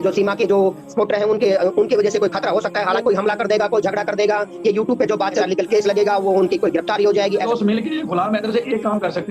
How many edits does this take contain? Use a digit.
3